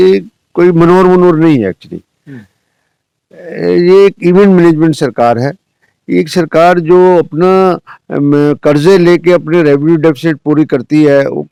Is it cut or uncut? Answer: uncut